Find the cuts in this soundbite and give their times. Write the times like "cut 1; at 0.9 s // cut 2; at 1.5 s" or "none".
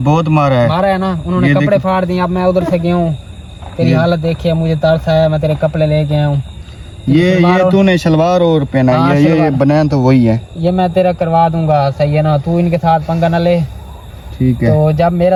none